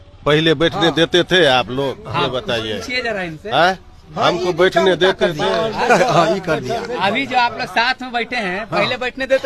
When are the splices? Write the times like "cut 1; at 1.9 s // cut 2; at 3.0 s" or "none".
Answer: none